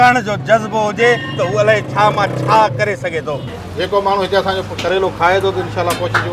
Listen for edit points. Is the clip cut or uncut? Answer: cut